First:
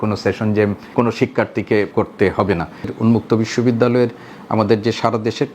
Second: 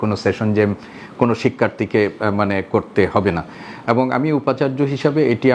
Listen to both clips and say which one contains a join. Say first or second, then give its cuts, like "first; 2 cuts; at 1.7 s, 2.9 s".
first; 3 cuts; at 0.8 s, 1.9 s, 2.9 s